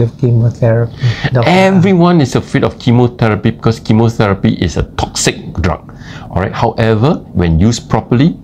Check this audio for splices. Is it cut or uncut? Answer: uncut